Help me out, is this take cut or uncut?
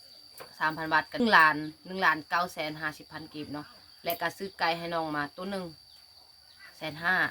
cut